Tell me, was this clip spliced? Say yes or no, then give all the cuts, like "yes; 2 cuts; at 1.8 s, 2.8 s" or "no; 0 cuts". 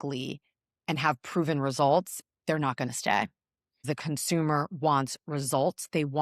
yes; 1 cut; at 3.8 s